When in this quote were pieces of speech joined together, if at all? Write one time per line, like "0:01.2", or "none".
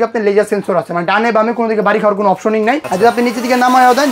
0:02.9